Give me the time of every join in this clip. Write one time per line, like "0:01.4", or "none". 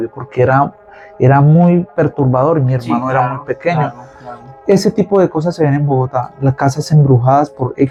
none